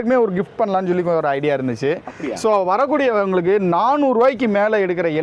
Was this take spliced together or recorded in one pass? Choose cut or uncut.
uncut